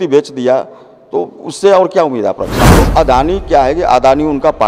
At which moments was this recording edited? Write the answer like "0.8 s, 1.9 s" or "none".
2.7 s